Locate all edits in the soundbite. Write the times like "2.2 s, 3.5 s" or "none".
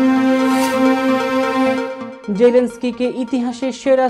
2.0 s